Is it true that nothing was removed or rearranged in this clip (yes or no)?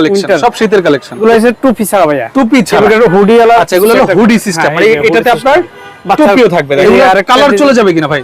no